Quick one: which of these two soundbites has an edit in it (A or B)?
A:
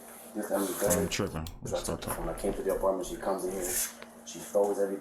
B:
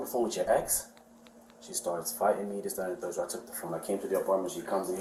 A